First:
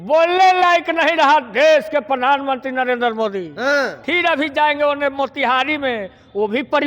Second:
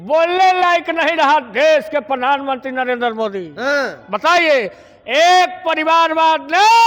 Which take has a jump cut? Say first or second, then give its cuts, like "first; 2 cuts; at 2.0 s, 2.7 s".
first; 1 cut; at 4.0 s